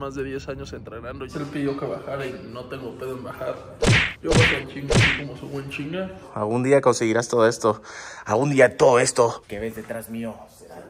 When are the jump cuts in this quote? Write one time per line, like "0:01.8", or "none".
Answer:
0:01.3
0:06.3